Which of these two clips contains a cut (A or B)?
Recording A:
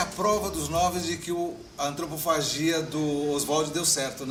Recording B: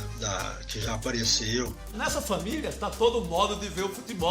B